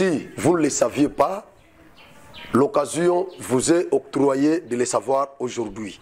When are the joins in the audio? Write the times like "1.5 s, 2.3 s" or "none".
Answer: none